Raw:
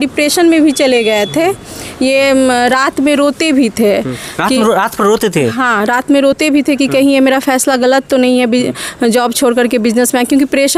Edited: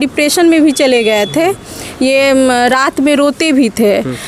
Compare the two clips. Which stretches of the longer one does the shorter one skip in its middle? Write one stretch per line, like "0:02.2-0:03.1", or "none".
none